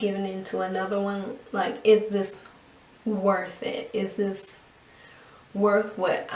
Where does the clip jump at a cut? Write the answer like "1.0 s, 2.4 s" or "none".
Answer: none